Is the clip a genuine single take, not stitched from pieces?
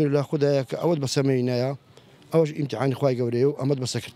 yes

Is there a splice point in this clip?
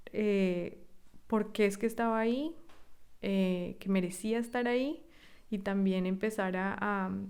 no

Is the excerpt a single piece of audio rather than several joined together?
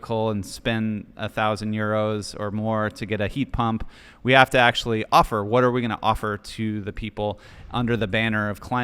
yes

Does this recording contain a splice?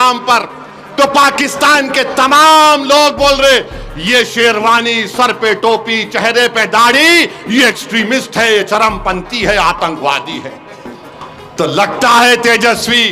no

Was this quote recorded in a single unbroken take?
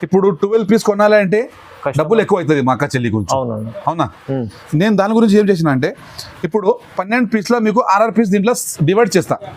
yes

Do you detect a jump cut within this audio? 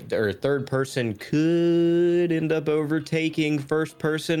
no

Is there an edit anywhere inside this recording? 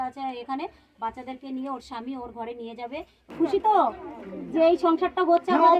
yes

